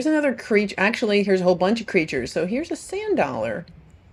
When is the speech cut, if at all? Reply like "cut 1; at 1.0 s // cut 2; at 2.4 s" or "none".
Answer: none